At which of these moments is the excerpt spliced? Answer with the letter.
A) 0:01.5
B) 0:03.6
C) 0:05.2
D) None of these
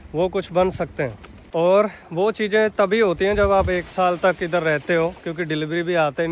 A